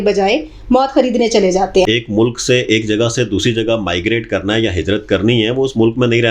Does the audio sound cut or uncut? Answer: cut